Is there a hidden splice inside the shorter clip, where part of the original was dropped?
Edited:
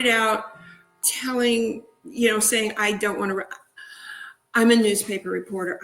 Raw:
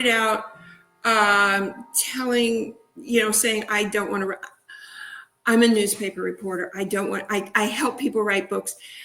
yes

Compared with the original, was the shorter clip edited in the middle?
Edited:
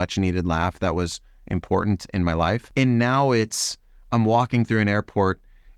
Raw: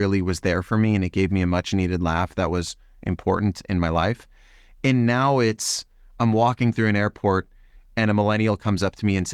yes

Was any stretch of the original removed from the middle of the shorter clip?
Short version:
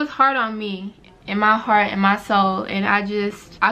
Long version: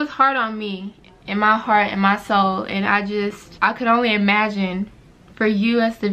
no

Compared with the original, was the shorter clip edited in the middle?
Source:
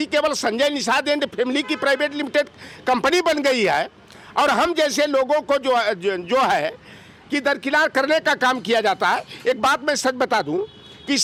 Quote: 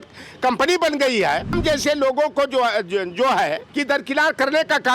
yes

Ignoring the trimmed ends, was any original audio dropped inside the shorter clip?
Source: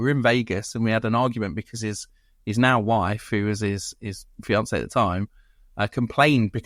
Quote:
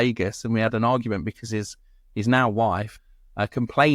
yes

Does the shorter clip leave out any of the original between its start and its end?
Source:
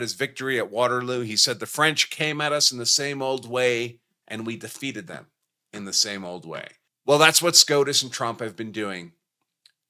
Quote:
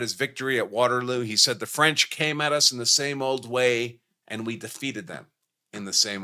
no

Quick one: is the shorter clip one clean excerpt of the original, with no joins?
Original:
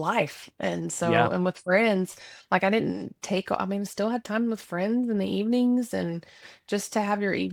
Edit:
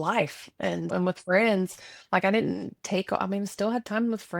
no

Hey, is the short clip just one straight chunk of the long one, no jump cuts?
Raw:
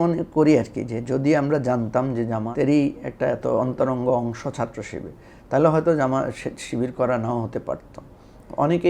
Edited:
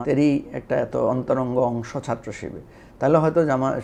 yes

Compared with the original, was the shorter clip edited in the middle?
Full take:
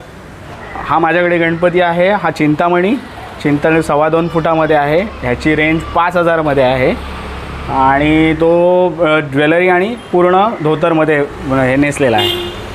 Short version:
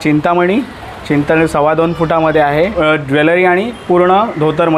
yes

